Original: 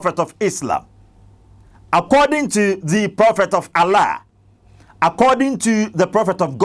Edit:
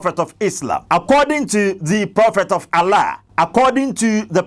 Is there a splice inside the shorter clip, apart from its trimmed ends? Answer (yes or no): yes